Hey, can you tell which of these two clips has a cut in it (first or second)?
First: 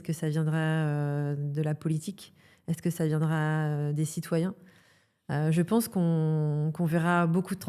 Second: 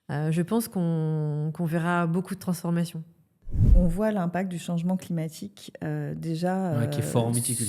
second